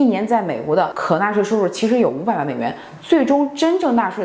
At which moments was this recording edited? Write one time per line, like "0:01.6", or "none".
0:01.0

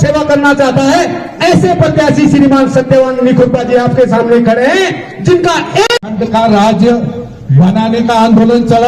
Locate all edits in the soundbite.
0:05.9

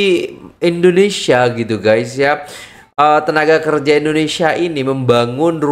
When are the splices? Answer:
none

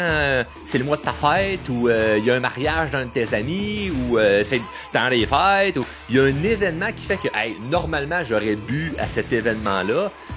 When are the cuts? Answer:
none

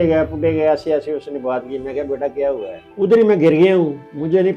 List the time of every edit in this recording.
0:02.8

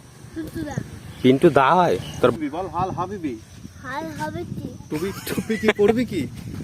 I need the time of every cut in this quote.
0:02.3

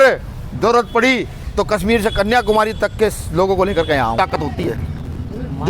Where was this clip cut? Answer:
0:04.2

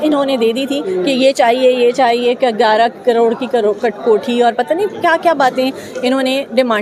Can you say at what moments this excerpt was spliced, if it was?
none

